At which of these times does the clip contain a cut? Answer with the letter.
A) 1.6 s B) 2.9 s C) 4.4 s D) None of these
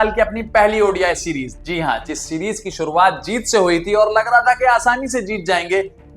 A